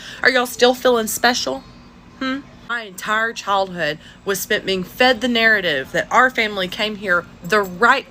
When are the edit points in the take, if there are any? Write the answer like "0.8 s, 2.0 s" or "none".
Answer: none